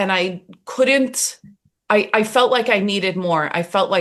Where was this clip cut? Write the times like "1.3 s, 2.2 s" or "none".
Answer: none